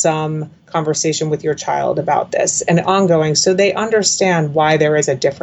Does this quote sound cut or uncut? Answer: uncut